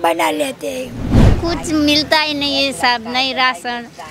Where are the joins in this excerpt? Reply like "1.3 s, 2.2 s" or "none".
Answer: 1.2 s